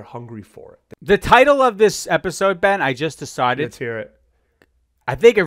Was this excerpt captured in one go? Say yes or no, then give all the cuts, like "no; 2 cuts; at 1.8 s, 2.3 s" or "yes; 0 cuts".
no; 1 cut; at 1.1 s